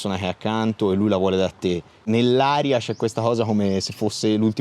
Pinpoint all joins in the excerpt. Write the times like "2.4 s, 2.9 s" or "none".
2.0 s